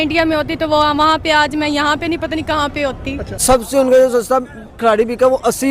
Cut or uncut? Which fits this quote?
cut